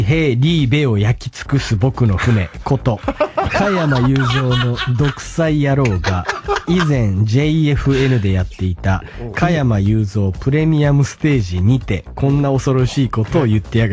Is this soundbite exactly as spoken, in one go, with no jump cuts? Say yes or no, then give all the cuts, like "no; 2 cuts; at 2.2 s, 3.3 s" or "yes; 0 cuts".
yes; 0 cuts